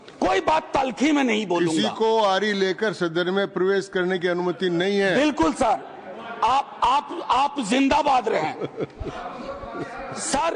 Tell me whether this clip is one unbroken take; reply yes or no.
yes